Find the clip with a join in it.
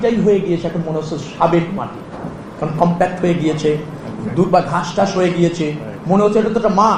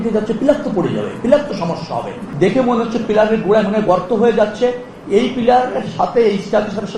second; 1 cut; at 2.2 s

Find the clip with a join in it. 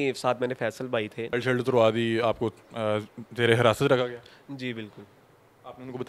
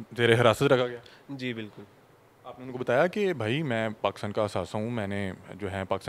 first; 1 cut; at 1.3 s

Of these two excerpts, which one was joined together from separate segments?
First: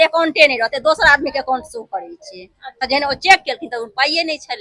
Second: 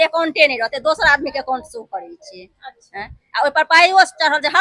first; 1 cut; at 2.9 s

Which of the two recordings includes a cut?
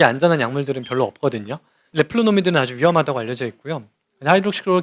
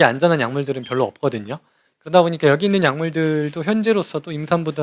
first; 1 cut; at 1.8 s

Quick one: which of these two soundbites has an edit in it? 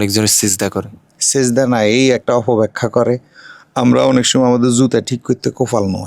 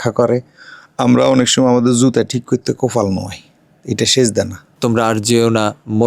second; 1 cut; at 4.6 s

